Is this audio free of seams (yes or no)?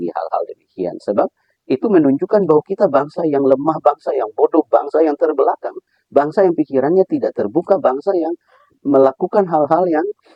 yes